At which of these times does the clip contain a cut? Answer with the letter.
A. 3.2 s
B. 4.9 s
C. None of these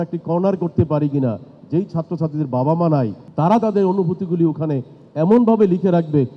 A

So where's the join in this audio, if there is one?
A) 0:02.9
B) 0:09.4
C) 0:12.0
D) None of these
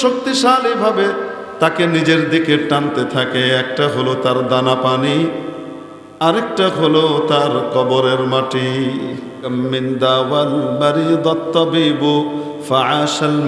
B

